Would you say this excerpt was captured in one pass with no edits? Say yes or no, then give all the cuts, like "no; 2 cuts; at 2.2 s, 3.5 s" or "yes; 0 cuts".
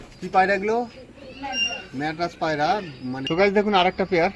no; 1 cut; at 3.2 s